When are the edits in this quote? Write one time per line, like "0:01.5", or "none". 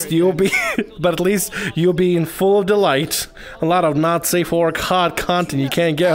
none